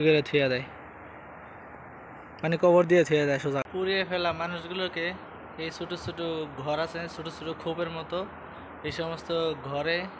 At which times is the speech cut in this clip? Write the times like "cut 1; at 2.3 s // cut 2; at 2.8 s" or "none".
cut 1; at 3.6 s